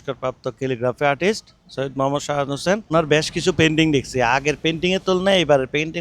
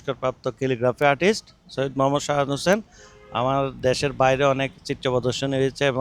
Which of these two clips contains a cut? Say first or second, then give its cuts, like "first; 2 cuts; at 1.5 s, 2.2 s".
first; 1 cut; at 2.9 s